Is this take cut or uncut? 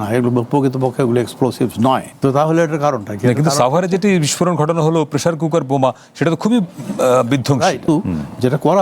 cut